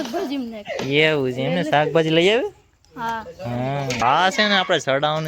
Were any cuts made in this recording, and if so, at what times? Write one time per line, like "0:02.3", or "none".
0:04.0